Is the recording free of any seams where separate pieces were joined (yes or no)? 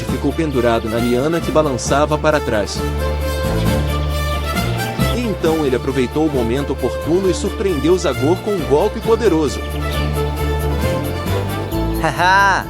no